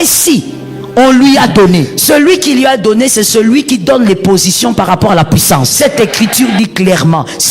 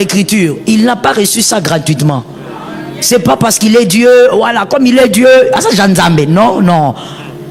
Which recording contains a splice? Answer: first; 2 cuts; at 1.9 s, 5.7 s

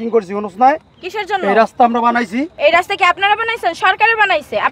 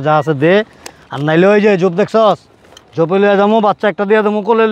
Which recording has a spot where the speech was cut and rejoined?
first; 1 cut; at 2.5 s

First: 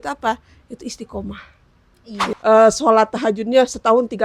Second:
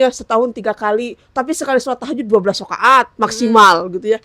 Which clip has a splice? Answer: first; 1 cut; at 2.3 s

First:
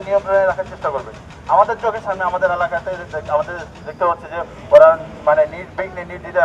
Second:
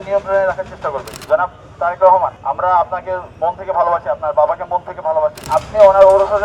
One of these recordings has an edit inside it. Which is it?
second; 3 cuts; at 1.1 s, 2.4 s, 5.4 s

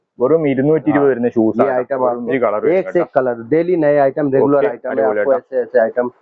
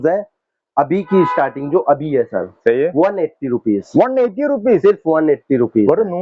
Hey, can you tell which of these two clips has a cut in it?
first; 1 cut; at 2.3 s

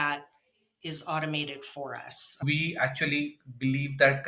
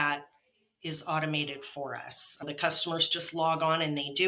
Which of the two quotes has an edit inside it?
first; 1 cut; at 2.4 s

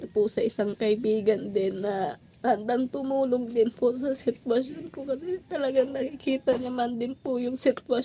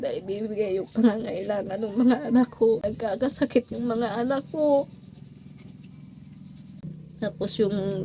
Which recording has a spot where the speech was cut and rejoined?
second; 2 cuts; at 2.9 s, 6.8 s

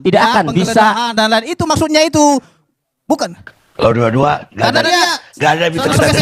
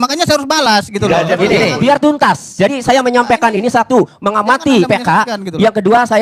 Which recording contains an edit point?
first; 1 cut; at 3.8 s

